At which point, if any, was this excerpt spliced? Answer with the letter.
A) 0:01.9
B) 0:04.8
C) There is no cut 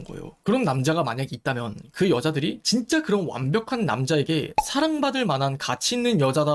A